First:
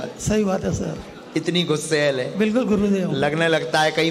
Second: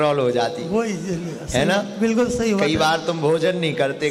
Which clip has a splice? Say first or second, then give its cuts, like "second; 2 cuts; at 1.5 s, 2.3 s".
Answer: first; 1 cut; at 1.8 s